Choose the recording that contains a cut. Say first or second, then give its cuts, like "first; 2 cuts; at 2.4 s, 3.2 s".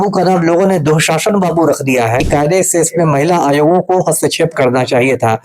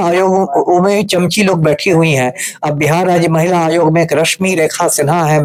first; 1 cut; at 2.2 s